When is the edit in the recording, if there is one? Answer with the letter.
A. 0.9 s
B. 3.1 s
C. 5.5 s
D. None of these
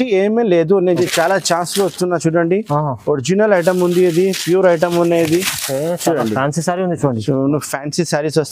A